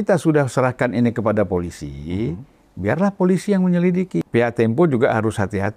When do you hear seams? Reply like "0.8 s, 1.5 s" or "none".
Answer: 4.2 s